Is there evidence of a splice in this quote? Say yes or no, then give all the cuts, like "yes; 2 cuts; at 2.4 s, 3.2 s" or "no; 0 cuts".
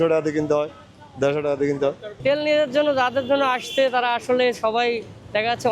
yes; 1 cut; at 2.1 s